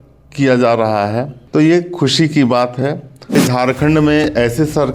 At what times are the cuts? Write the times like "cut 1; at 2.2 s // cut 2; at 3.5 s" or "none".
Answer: cut 1; at 1.3 s // cut 2; at 3.3 s

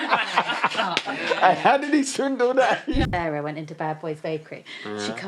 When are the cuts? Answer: cut 1; at 3.1 s

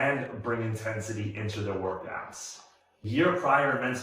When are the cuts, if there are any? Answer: cut 1; at 3.1 s

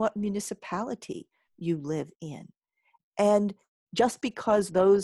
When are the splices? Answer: none

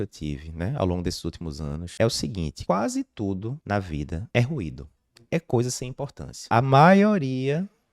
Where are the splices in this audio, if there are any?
cut 1; at 1.8 s // cut 2; at 2.5 s // cut 3; at 4.0 s // cut 4; at 6.4 s

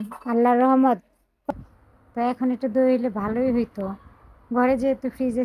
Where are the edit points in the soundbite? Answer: cut 1; at 1.5 s

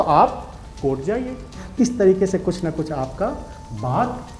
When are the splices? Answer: cut 1; at 1.6 s

